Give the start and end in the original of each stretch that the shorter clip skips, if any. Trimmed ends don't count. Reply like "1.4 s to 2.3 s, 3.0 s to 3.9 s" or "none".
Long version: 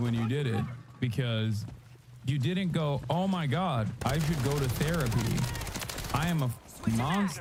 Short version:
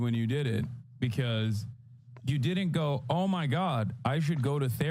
none